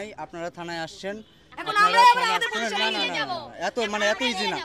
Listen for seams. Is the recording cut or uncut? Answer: uncut